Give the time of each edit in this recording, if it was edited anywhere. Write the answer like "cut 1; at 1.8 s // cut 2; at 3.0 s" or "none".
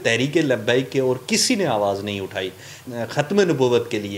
cut 1; at 2.8 s